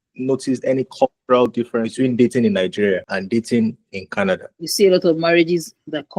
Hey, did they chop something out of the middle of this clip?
yes; 3 cuts; at 1.5 s, 3.1 s, 4.6 s

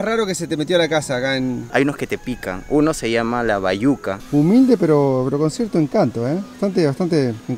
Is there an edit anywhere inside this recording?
yes; 2 cuts; at 1.7 s, 4.1 s

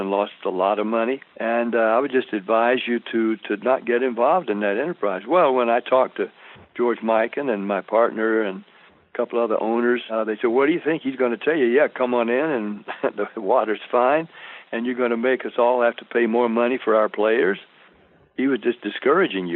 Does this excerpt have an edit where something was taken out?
yes; 2 cuts; at 1.3 s, 10.1 s

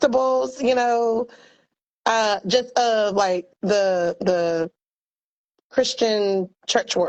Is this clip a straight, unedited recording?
yes; 0 cuts

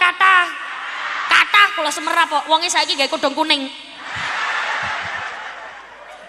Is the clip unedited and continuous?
yes; 0 cuts

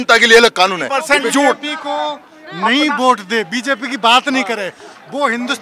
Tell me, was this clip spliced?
yes; 1 cut; at 1.0 s

